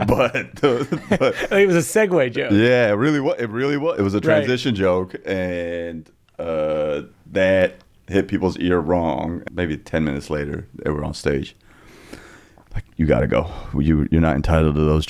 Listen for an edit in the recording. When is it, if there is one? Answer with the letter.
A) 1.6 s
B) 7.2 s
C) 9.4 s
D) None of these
C